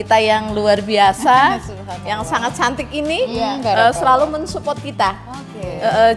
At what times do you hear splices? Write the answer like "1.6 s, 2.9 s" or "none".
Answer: none

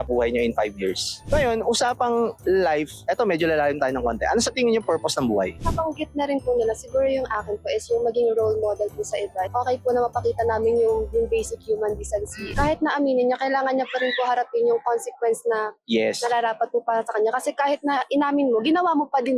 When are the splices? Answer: 1.2 s, 5.6 s, 9.5 s, 12.4 s

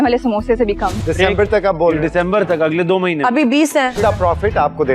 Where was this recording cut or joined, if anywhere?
1.0 s, 4.0 s

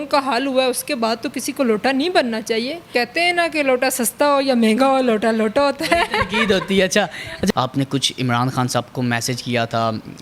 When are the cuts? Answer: 2.8 s, 7.5 s

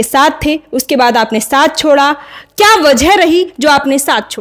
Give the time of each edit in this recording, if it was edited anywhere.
none

